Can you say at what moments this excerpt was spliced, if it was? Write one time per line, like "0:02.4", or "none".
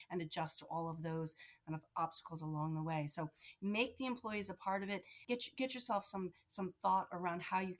0:05.1